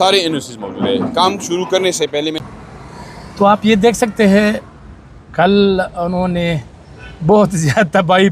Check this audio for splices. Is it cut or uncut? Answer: cut